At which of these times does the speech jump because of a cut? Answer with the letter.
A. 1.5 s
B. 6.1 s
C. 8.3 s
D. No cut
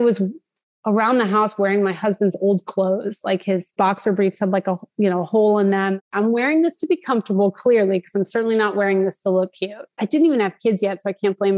B